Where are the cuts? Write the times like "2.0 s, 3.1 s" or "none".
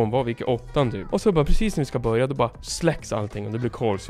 1.0 s, 2.7 s